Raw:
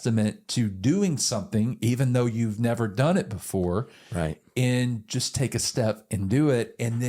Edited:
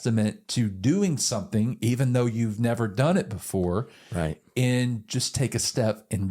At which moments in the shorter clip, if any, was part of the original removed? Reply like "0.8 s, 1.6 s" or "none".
none